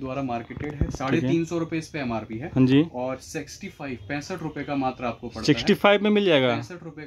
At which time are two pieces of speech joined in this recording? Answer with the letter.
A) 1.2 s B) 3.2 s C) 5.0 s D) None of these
D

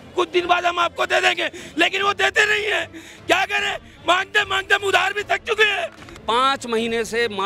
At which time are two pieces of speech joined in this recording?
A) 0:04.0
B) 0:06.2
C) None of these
B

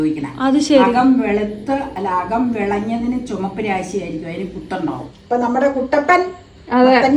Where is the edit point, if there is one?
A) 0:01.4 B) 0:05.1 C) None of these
B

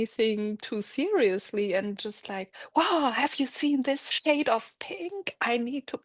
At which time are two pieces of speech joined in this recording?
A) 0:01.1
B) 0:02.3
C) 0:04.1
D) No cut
C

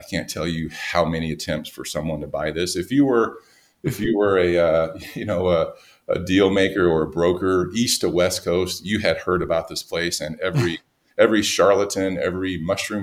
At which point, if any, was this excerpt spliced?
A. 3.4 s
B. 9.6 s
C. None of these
C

